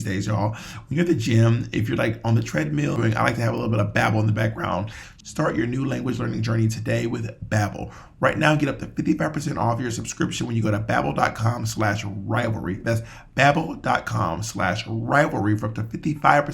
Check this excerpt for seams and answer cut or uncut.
cut